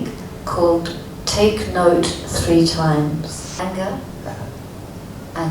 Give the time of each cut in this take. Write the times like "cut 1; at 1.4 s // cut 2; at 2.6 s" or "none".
cut 1; at 3.6 s